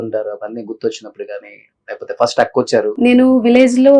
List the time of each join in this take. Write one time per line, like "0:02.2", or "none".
0:02.9